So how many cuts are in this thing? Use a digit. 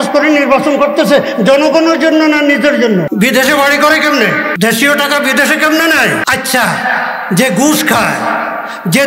3